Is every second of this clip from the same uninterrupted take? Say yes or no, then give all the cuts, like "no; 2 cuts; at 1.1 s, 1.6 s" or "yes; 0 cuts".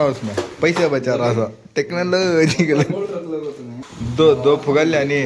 no; 1 cut; at 3.6 s